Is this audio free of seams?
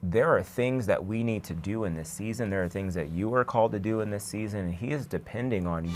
yes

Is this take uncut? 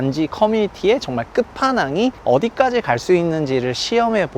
no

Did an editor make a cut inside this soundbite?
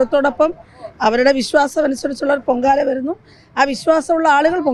no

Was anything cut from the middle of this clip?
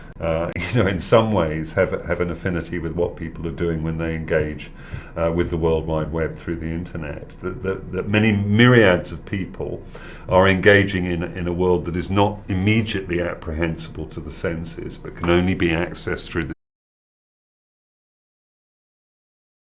no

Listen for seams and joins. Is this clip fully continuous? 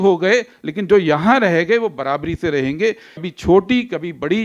no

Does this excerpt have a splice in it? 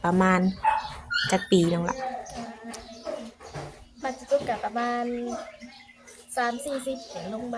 no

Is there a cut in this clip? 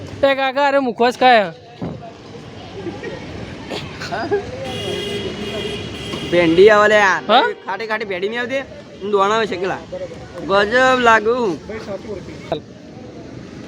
yes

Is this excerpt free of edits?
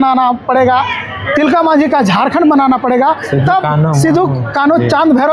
yes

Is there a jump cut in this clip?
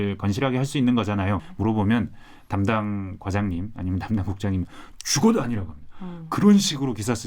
yes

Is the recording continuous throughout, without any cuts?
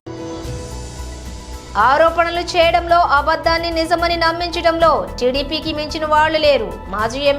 no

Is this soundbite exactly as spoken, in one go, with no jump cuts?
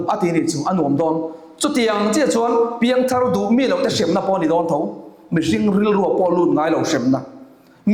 yes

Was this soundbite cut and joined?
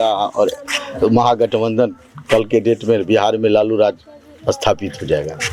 no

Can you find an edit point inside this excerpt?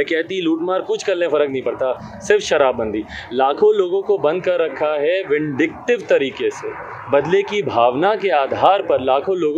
no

